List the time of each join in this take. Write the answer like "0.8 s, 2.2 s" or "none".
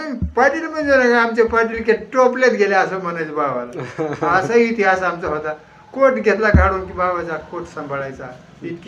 none